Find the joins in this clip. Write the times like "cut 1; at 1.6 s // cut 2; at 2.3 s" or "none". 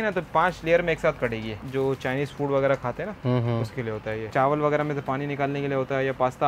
cut 1; at 1.5 s // cut 2; at 4.3 s